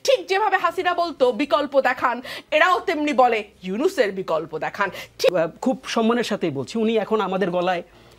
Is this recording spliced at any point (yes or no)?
yes